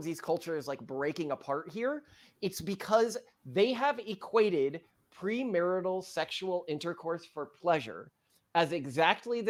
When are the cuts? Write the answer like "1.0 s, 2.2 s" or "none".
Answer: none